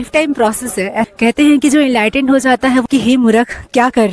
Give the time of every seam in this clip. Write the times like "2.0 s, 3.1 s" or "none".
1.1 s, 2.9 s